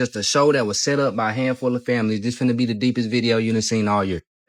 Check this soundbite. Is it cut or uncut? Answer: uncut